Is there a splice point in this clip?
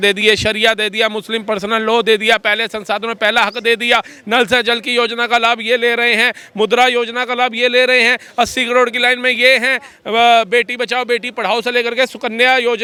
no; 0 cuts

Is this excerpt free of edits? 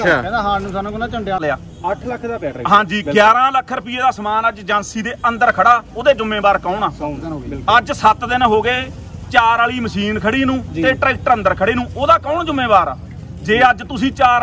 no; 1 cut; at 1.4 s

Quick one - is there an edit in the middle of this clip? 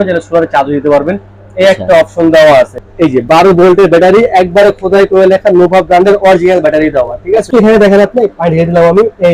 yes; 2 cuts; at 2.8 s, 7.5 s

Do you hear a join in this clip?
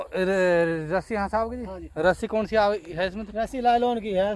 no; 0 cuts

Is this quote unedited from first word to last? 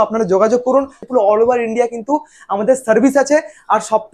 no; 1 cut; at 1.0 s

